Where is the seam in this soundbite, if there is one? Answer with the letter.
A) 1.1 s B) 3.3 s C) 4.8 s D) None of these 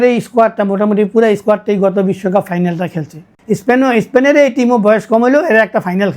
B